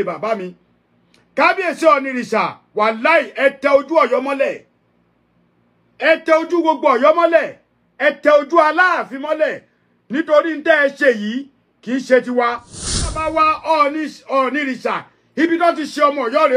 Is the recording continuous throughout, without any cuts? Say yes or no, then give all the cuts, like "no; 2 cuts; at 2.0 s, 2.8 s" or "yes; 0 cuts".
no; 1 cut; at 13.2 s